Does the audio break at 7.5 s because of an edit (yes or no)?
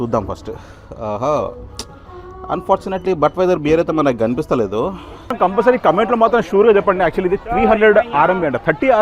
no